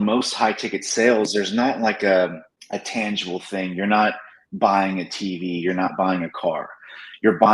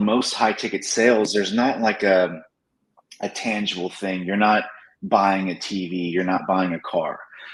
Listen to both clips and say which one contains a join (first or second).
first